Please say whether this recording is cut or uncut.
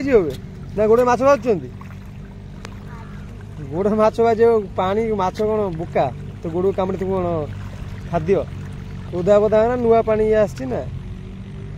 uncut